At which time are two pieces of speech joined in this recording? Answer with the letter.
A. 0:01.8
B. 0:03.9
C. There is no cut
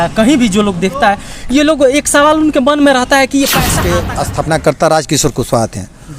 B